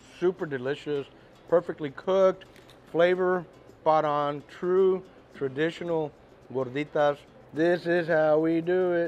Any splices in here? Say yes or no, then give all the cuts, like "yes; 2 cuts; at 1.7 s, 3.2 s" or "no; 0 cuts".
yes; 1 cut; at 7.3 s